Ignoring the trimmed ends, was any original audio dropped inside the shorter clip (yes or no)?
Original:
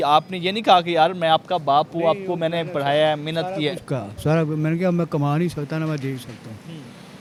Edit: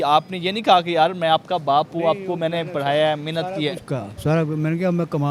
no